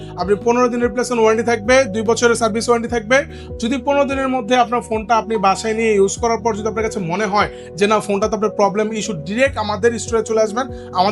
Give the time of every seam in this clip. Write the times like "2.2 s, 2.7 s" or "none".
none